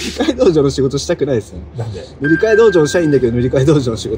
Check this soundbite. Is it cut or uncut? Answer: uncut